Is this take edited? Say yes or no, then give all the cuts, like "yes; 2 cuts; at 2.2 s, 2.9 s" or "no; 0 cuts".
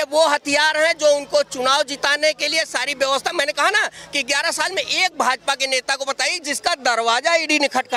no; 0 cuts